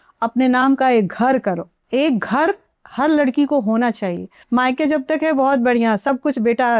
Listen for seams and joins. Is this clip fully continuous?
no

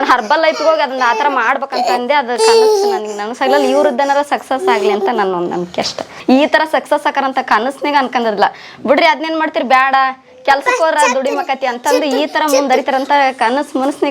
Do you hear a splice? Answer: yes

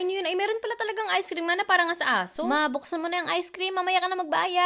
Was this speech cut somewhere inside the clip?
no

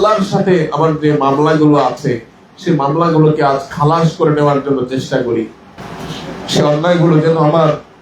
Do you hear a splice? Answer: yes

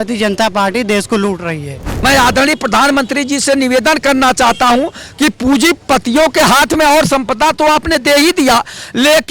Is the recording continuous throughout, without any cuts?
no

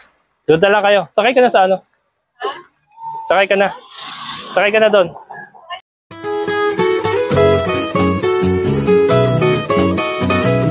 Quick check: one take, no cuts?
no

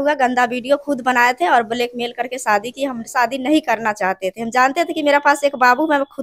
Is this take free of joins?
yes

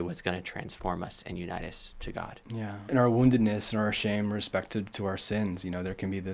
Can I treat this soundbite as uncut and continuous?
no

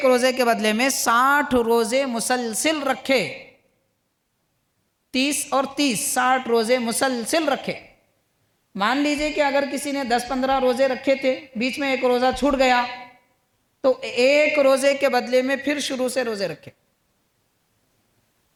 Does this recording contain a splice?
no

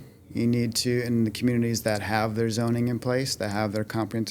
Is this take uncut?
yes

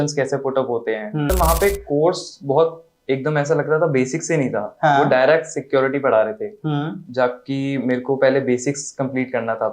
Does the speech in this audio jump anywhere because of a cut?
yes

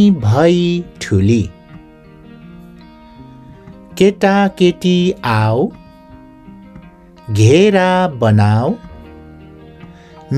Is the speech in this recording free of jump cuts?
no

